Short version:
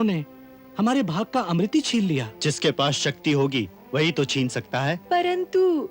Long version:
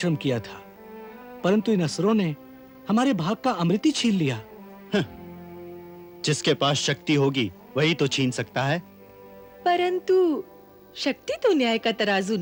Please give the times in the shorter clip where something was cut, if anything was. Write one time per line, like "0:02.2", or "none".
0:02.3
0:05.0